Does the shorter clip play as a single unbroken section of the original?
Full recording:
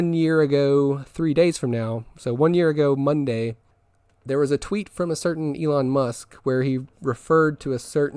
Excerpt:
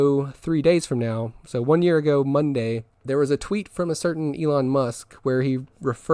no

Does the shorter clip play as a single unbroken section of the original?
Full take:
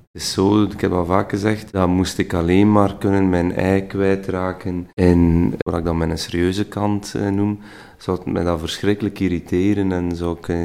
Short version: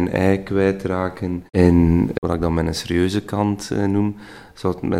yes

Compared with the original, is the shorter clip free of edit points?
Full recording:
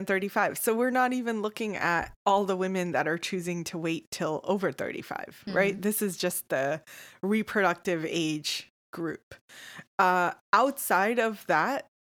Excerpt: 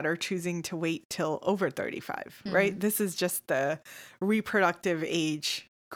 yes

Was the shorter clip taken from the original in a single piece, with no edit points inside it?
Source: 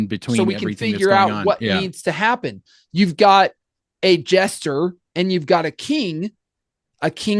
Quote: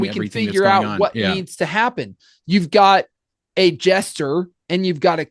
yes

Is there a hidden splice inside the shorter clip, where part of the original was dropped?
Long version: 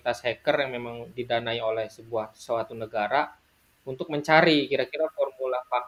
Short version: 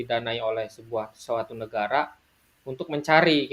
no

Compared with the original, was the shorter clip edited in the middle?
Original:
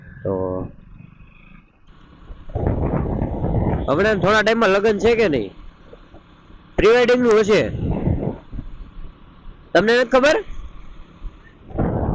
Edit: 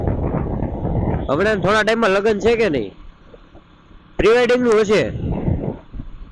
no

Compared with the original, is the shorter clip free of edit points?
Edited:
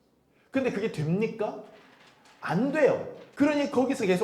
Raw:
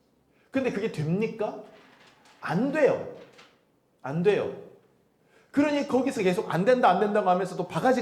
no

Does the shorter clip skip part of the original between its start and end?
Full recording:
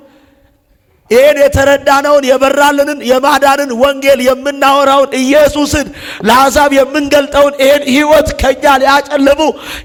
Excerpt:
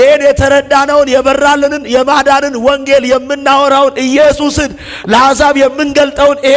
no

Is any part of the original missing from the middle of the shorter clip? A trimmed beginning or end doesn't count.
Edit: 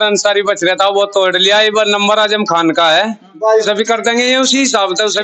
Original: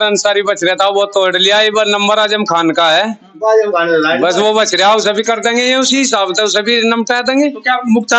yes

